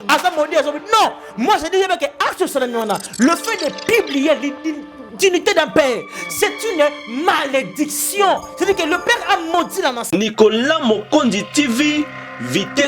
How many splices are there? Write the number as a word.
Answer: one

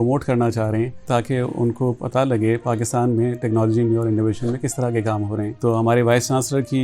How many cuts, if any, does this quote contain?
two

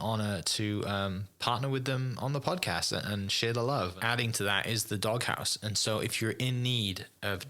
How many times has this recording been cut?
one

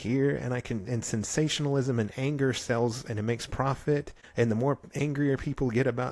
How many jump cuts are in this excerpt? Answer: one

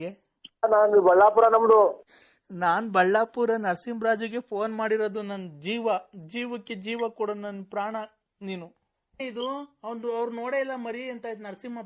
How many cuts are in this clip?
two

